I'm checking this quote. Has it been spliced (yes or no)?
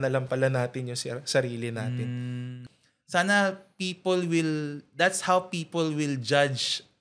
yes